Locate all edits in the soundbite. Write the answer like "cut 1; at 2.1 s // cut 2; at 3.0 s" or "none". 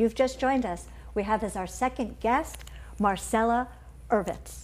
cut 1; at 2.0 s